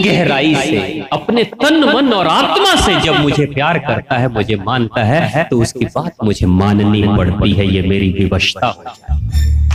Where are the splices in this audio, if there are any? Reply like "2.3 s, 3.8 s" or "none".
none